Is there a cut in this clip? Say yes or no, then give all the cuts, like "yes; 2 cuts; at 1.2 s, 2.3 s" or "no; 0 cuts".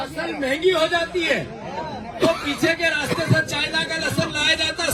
no; 0 cuts